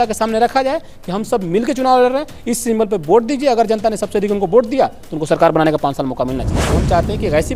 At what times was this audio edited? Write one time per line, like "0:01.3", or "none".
0:06.5